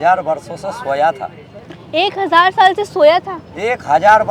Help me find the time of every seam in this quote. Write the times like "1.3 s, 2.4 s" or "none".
none